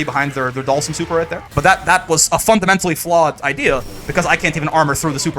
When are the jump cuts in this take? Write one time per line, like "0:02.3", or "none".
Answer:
0:01.4

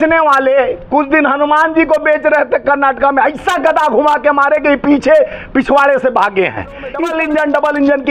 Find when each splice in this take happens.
0:07.0

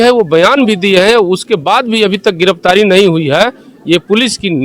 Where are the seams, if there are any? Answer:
none

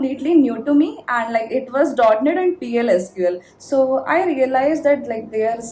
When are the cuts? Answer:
0:03.5

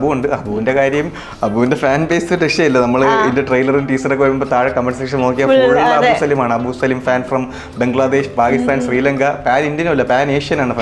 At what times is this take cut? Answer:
none

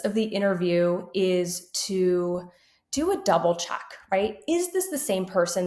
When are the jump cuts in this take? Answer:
none

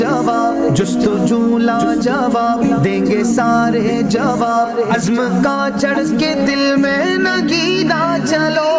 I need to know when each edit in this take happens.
none

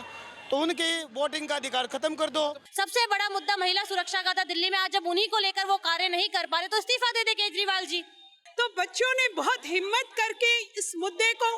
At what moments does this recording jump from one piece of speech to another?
0:02.6
0:08.3

